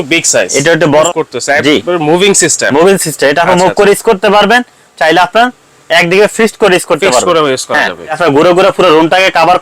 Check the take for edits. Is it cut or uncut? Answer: cut